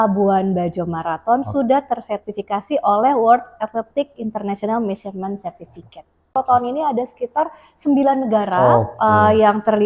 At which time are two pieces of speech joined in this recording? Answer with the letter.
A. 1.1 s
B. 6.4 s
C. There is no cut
B